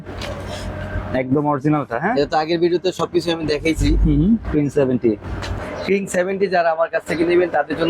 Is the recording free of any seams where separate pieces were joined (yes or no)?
no